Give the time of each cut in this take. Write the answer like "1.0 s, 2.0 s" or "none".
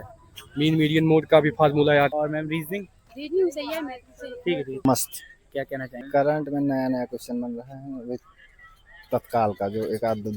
2.1 s, 6.0 s